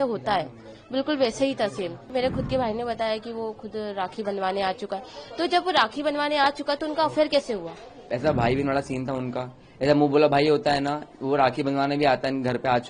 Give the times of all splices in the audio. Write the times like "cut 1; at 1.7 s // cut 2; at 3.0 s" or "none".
cut 1; at 2.1 s // cut 2; at 8.0 s